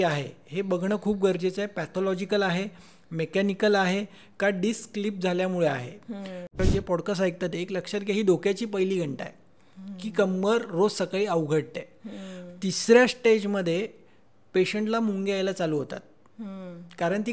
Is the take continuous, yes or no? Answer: no